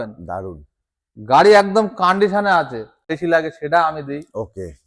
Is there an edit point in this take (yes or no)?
yes